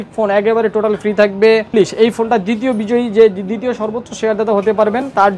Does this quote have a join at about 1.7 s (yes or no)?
yes